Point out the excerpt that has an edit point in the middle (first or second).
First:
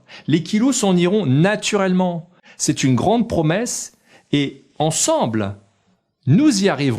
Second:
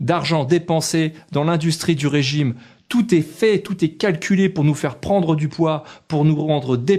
first